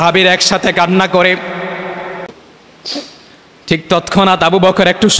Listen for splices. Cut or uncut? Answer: cut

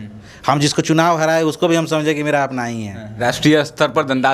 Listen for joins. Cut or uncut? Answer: cut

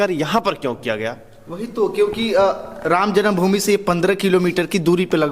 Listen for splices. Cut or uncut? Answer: uncut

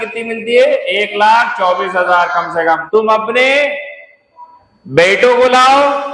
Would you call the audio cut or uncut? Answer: cut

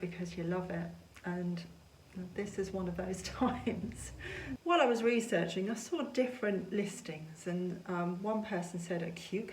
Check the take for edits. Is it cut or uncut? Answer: cut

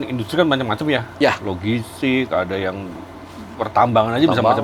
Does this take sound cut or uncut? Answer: uncut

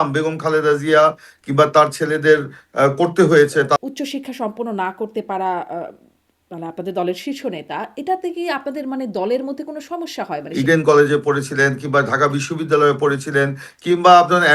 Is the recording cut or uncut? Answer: cut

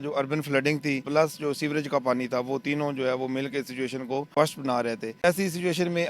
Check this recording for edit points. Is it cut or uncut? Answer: cut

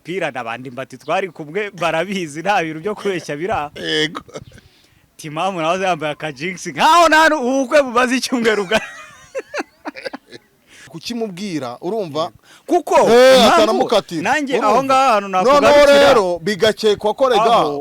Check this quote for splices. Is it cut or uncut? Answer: cut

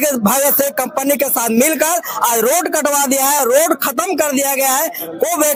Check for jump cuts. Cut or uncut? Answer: uncut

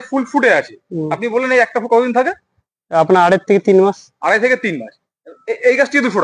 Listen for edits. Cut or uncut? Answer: uncut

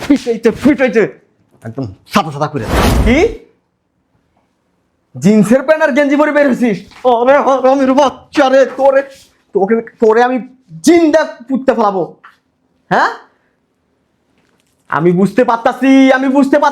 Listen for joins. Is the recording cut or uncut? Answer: cut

